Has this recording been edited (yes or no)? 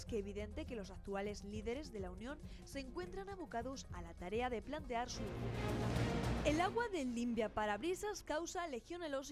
yes